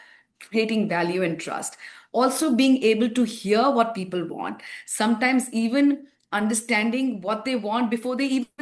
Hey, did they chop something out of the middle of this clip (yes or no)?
no